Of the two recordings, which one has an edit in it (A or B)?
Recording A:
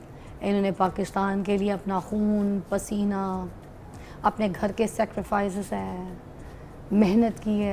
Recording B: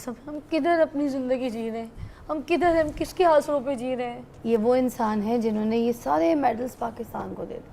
B